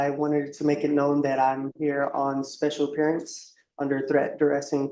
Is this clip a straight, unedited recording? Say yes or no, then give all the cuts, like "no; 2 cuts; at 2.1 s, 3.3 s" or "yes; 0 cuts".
yes; 0 cuts